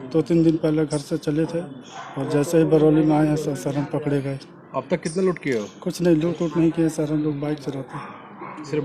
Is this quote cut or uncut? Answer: uncut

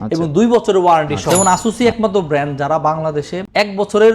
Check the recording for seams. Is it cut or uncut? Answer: cut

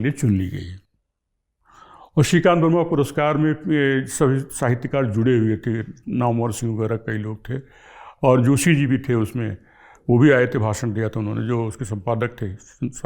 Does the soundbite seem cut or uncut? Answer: uncut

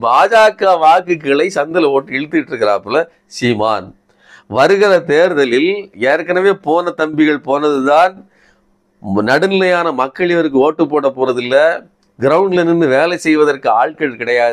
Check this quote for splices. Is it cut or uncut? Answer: uncut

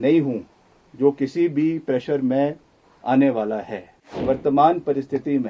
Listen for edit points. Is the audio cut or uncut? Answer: cut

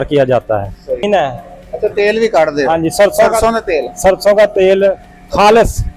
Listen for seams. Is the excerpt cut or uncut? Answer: cut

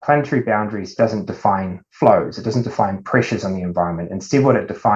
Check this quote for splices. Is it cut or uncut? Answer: uncut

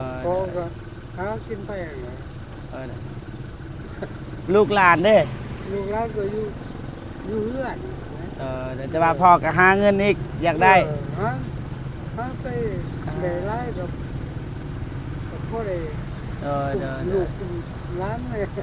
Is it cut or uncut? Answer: uncut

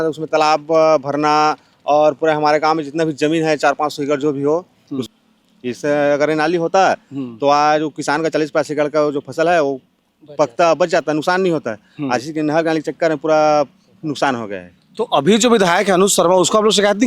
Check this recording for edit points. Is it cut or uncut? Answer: cut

